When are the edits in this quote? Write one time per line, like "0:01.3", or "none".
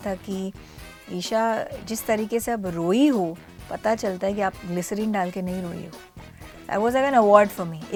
none